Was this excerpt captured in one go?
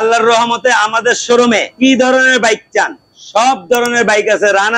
no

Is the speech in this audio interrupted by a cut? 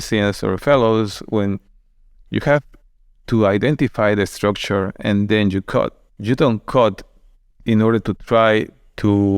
no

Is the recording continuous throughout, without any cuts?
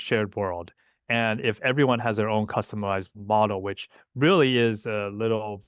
yes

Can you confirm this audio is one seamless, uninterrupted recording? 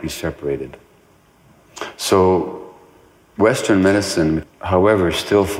no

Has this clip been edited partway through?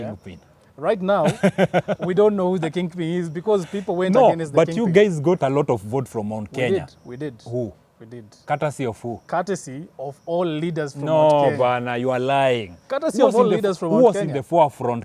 no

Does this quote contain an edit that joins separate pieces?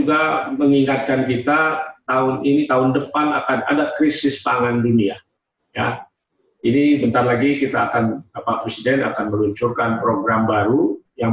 no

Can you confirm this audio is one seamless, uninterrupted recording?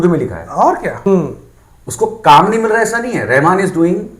no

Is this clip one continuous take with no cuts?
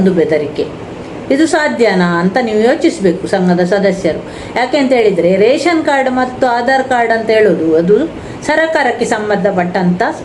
yes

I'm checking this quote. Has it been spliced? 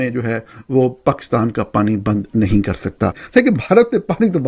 yes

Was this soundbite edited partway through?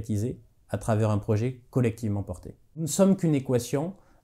yes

